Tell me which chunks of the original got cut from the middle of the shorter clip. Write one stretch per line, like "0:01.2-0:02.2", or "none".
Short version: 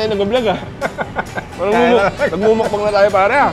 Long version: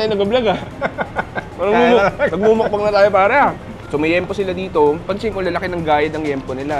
none